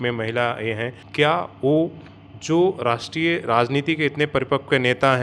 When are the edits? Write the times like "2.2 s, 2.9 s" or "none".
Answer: 1.0 s